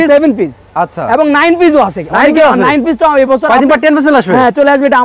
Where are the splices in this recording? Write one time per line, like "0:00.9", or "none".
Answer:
none